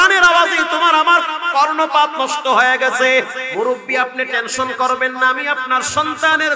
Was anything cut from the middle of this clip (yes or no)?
yes